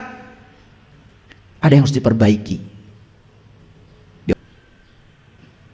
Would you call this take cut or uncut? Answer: cut